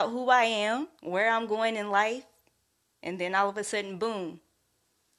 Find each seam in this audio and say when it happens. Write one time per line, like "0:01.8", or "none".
0:00.9